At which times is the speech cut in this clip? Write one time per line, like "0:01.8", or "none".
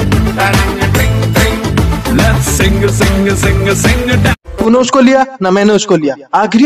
0:04.4